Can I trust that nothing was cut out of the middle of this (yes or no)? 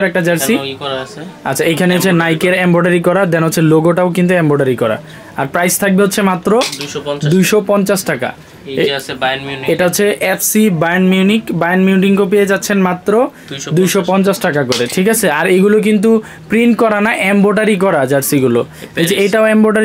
yes